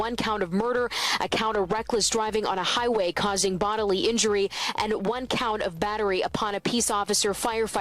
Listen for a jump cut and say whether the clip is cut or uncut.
uncut